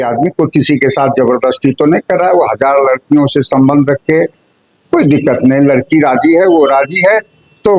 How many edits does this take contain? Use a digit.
0